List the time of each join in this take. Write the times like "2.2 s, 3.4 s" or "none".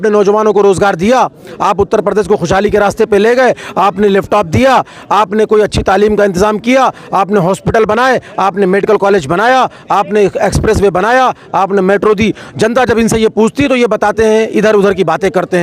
none